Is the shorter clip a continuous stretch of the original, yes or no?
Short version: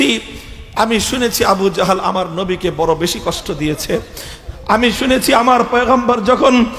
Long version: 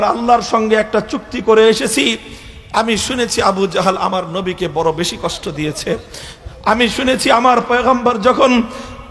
yes